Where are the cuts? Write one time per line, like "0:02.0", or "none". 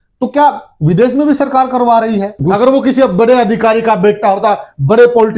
0:02.4